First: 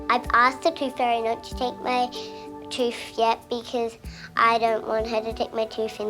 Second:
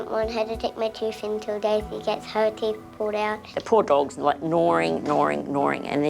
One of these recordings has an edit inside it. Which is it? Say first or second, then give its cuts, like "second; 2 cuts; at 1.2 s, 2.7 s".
second; 1 cut; at 3.5 s